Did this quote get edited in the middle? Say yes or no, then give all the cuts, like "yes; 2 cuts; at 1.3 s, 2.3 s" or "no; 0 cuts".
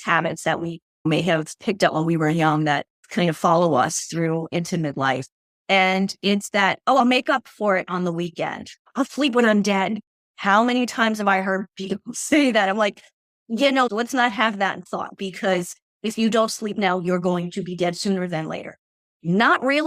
no; 0 cuts